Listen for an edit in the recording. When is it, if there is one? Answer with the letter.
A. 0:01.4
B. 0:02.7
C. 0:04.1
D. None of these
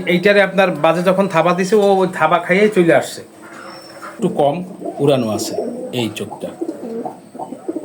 C